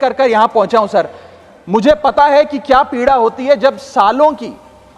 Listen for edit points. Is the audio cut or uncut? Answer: uncut